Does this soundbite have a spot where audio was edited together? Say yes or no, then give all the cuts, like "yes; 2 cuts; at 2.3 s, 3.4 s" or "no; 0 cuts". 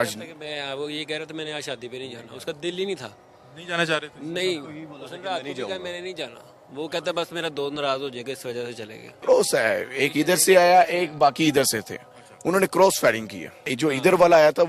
yes; 2 cuts; at 9.1 s, 13.7 s